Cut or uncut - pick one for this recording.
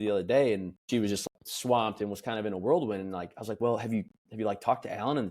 cut